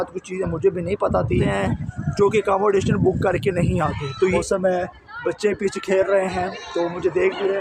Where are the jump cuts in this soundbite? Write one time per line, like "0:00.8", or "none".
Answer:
0:01.4
0:04.3